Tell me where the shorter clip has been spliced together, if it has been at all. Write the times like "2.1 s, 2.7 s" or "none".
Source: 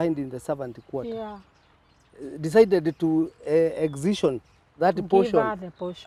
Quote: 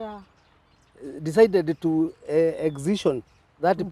none